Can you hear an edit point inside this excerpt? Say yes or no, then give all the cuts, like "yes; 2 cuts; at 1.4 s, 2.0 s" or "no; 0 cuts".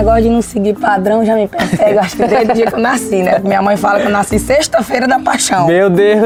no; 0 cuts